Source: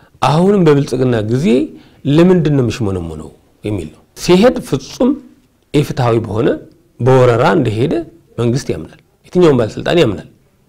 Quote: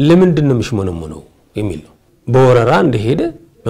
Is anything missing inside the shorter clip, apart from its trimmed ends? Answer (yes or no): yes